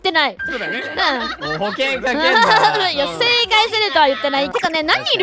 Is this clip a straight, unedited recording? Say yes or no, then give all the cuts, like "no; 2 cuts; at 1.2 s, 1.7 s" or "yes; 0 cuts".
yes; 0 cuts